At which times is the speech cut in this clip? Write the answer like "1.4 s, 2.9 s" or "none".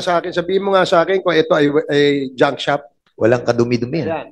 3.0 s